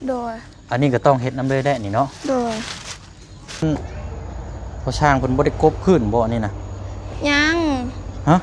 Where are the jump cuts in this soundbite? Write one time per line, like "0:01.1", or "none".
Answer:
0:03.6